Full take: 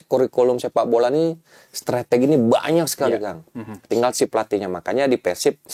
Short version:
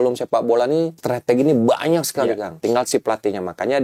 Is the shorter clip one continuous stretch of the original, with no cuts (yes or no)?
no